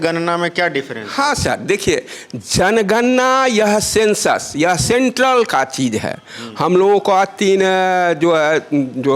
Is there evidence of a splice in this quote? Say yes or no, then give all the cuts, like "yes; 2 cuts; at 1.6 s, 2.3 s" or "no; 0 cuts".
no; 0 cuts